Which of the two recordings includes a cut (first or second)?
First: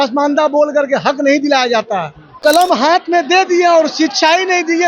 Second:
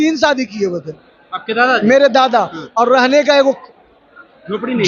first